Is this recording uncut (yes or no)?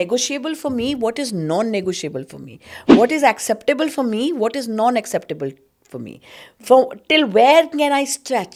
yes